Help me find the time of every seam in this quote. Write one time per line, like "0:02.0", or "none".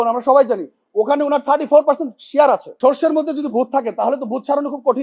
0:02.7